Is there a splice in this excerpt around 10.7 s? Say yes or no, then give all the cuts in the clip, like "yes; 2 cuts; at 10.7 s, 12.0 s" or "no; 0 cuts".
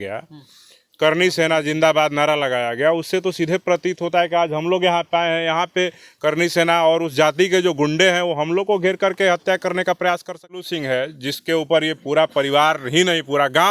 yes; 1 cut; at 10.7 s